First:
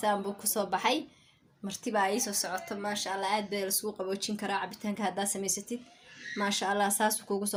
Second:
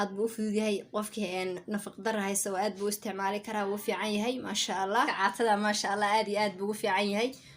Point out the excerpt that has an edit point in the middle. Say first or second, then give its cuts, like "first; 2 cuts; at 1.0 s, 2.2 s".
second; 1 cut; at 5.1 s